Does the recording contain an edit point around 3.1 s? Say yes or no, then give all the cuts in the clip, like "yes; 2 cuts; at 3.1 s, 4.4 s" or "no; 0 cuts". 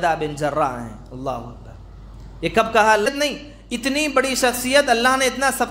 yes; 1 cut; at 3.1 s